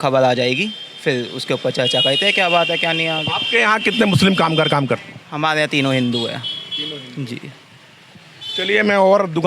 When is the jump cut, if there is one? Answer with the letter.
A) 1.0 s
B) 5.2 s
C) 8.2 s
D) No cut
D